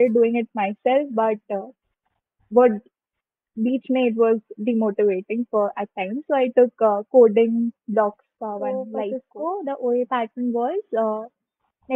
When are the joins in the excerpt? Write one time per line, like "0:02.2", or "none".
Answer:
0:08.9